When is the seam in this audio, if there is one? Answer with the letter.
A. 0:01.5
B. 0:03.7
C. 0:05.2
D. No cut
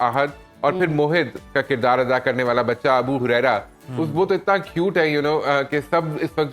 D